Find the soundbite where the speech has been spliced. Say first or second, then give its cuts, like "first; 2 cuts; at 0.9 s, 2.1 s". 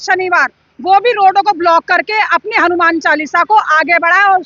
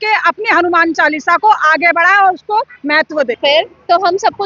second; 1 cut; at 3.4 s